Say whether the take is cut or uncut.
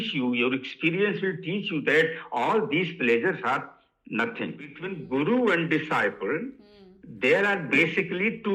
cut